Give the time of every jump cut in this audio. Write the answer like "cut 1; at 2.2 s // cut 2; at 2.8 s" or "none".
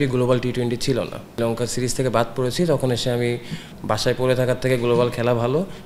cut 1; at 1.3 s // cut 2; at 3.7 s